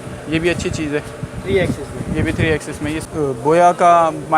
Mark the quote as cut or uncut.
cut